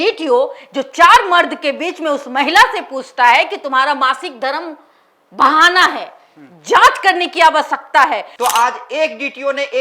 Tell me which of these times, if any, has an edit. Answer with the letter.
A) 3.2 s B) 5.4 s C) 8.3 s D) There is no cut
C